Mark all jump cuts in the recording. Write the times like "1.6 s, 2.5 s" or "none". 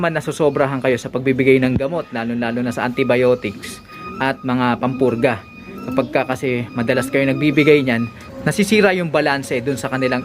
none